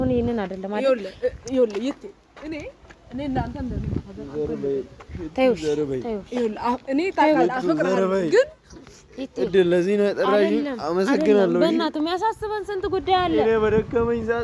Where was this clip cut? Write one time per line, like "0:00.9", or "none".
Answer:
none